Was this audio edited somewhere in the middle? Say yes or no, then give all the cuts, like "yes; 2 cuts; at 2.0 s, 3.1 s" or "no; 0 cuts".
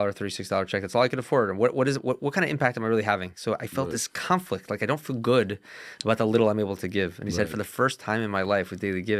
no; 0 cuts